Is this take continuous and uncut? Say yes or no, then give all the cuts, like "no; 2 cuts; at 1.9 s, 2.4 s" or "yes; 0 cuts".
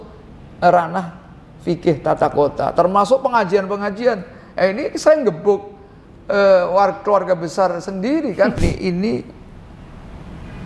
no; 1 cut; at 8.6 s